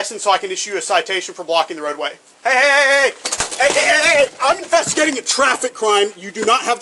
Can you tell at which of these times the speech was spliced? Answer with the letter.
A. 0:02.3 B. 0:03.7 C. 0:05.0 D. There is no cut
A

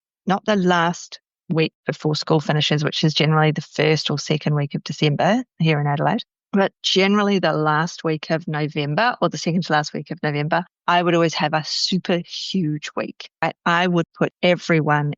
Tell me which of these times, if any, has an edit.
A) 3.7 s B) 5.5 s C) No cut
C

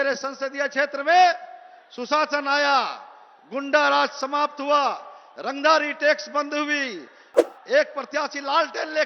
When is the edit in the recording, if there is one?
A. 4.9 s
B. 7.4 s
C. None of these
B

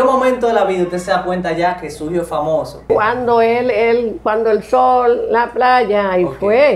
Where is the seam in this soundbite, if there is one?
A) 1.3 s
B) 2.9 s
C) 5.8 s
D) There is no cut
B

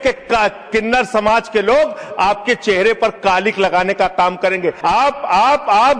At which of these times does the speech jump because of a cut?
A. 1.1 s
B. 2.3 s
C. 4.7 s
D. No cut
C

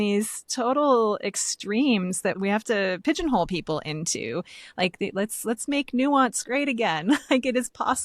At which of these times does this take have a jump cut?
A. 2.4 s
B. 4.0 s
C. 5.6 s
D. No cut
A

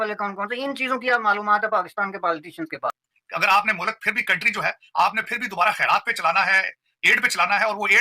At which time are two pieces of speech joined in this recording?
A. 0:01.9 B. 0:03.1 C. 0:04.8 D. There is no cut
B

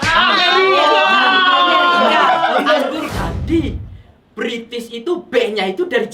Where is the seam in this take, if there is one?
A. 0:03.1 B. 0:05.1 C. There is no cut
A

